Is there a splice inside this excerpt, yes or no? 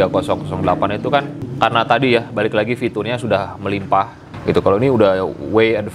yes